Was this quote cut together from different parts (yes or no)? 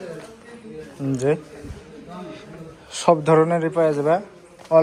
no